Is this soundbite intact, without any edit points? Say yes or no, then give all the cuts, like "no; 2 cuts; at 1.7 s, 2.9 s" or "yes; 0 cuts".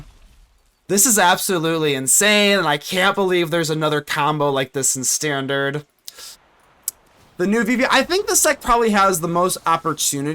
no; 1 cut; at 6.3 s